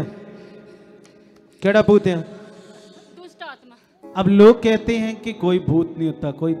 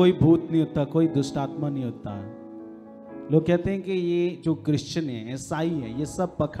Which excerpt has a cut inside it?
first; 1 cut; at 4.1 s

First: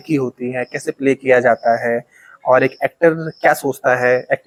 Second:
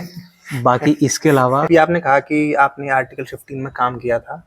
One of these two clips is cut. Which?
second; 1 cut; at 1.7 s

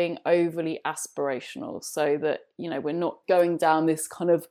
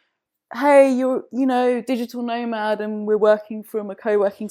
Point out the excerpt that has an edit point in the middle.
first; 1 cut; at 3.2 s

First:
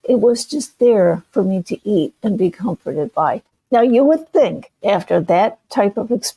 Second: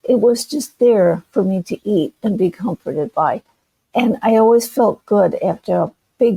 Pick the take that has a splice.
first; 2 cuts; at 3.5 s, 4.7 s

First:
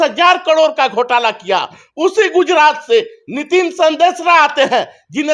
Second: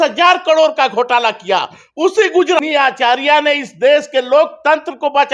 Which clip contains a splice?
second; 1 cut; at 2.6 s

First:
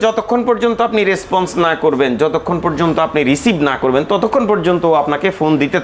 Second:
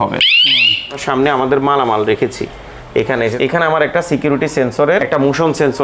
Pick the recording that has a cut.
second; 3 cuts; at 1.0 s, 3.3 s, 5.0 s

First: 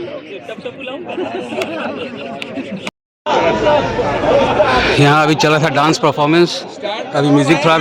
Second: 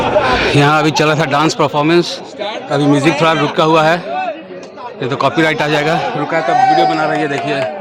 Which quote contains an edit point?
first; 1 cut; at 3.0 s

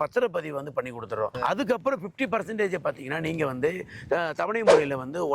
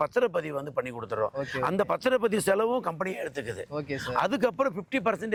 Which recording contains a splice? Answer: first; 1 cut; at 1.3 s

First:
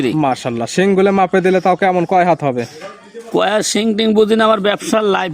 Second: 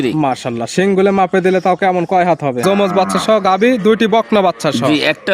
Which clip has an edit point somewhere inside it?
second; 1 cut; at 2.6 s

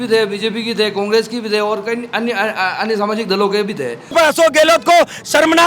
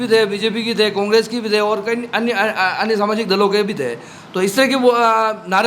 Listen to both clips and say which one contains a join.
first; 1 cut; at 4.1 s

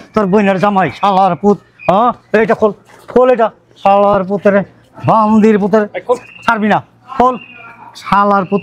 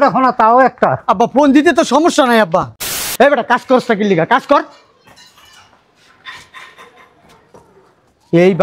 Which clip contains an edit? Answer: second; 1 cut; at 3.0 s

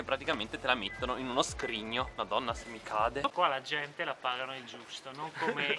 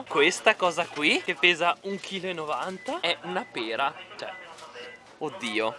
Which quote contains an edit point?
first; 1 cut; at 3.3 s

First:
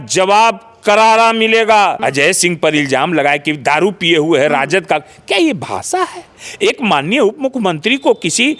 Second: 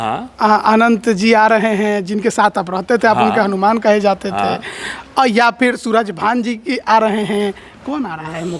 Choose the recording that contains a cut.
first; 1 cut; at 2.0 s

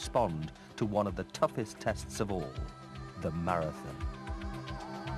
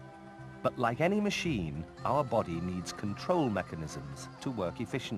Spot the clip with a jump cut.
second; 1 cut; at 1.7 s

